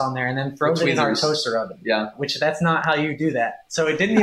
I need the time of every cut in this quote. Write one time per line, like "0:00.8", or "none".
0:02.2